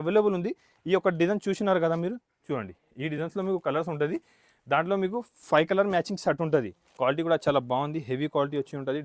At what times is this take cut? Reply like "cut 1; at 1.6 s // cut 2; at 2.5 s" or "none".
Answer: cut 1; at 6.8 s